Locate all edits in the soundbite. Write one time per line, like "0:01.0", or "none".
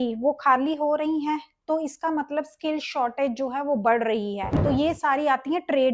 0:04.5